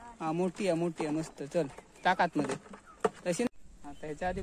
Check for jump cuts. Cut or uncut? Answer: cut